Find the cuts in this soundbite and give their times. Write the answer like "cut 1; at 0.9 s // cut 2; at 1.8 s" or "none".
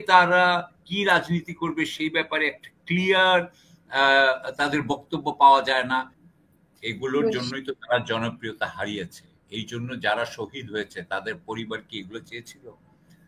cut 1; at 6.2 s